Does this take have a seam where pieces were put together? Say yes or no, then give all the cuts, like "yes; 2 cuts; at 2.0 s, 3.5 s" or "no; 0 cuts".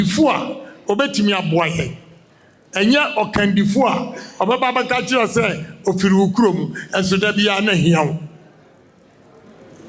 no; 0 cuts